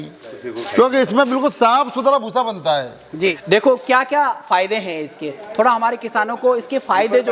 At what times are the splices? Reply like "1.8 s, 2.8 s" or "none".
3.4 s